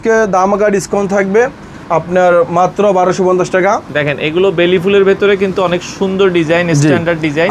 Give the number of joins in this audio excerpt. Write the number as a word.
one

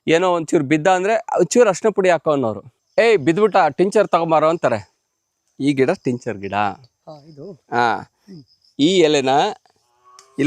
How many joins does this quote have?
one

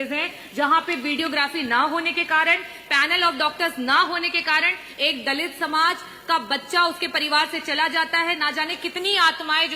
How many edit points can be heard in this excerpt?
zero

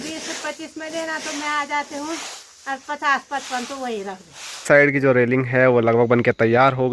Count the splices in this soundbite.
one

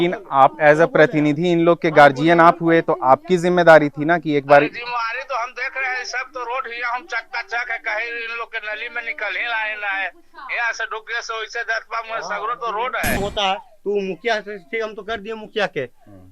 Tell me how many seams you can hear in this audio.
one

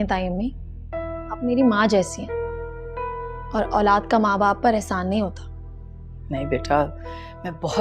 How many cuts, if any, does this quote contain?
two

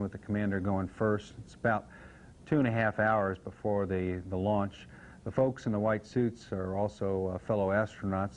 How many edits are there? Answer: zero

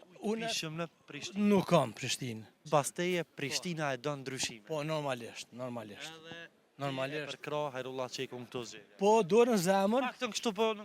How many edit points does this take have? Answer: one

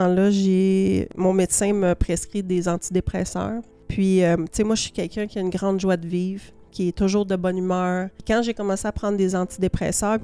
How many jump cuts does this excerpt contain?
three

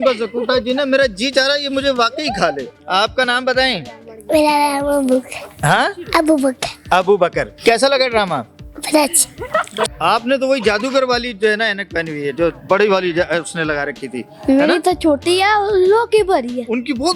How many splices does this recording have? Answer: three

